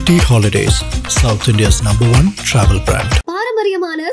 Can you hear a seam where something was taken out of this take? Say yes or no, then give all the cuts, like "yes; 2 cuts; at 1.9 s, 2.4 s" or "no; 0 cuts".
no; 0 cuts